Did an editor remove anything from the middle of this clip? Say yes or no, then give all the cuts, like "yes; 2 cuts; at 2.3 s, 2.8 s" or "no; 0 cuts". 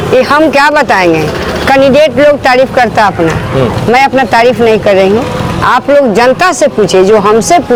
no; 0 cuts